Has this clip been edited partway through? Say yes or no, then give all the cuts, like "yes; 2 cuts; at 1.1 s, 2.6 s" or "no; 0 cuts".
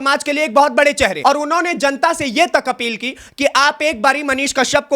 yes; 1 cut; at 1.2 s